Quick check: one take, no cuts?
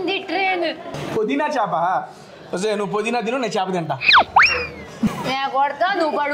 no; 2 cuts; at 0.9 s, 5.1 s

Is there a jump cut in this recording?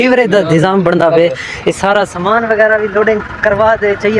no; 0 cuts

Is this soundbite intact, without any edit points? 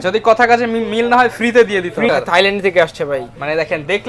no; 1 cut; at 2.1 s

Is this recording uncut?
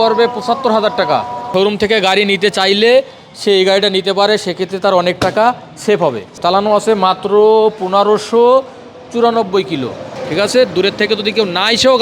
no; 3 cuts; at 1.5 s, 6.3 s, 10.1 s

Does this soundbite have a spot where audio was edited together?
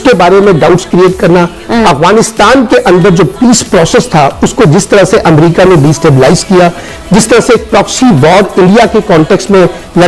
no; 0 cuts

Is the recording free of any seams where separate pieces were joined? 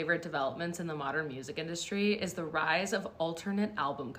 yes; 0 cuts

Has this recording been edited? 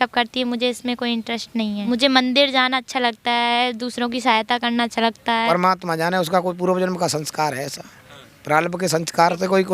yes; 2 cuts; at 1.8 s, 5.5 s

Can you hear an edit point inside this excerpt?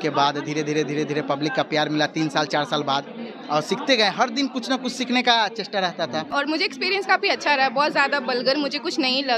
yes; 1 cut; at 6.3 s

